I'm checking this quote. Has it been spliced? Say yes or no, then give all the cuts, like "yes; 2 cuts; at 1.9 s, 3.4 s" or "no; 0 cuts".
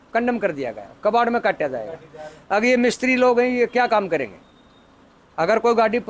no; 0 cuts